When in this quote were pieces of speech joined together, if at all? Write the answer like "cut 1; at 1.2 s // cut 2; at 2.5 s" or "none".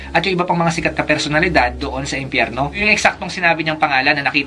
cut 1; at 2.8 s